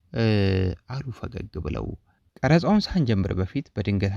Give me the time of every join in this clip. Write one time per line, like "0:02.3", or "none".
0:02.2